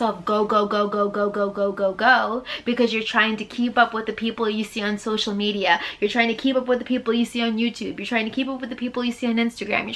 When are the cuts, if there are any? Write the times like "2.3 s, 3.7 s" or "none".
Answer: none